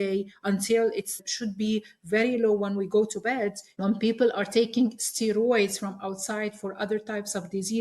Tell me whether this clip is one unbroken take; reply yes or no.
no